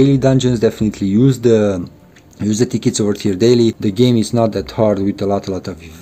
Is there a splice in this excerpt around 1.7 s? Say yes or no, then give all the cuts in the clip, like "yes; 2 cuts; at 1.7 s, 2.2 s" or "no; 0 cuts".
no; 1 cut; at 3.8 s